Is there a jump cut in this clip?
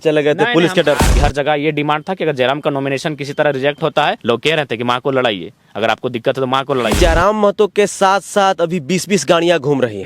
yes; 3 cuts; at 1.1 s, 4.2 s, 6.9 s

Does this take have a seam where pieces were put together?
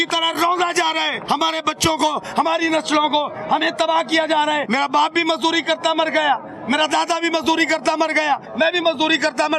yes; 3 cuts; at 1.2 s, 4.7 s, 8.5 s

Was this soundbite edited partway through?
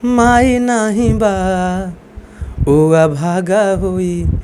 no; 0 cuts

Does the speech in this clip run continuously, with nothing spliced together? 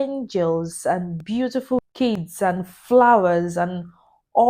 no; 1 cut; at 1.8 s

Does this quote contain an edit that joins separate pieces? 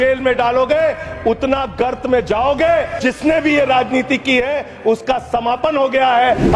yes; 1 cut; at 3.0 s

